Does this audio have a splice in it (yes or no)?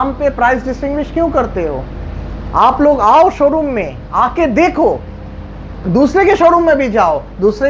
no